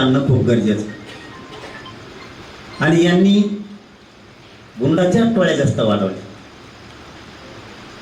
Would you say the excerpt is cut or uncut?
uncut